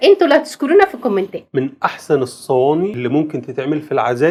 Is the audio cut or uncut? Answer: uncut